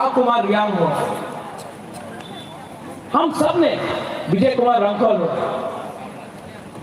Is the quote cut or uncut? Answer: uncut